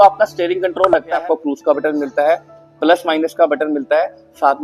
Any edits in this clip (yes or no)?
yes